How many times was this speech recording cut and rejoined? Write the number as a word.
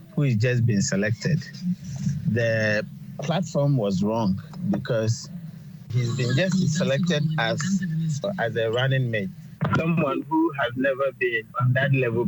zero